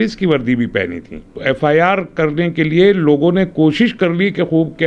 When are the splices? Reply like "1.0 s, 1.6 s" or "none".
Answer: 1.3 s